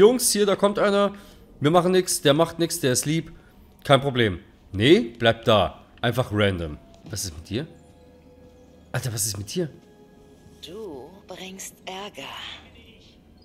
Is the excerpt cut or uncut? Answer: cut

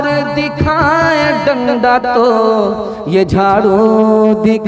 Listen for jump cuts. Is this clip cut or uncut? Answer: uncut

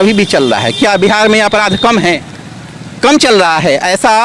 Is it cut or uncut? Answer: uncut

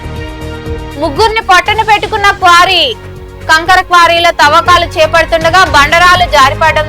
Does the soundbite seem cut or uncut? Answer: cut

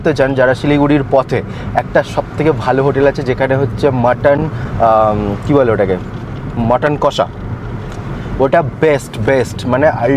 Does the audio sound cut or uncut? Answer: uncut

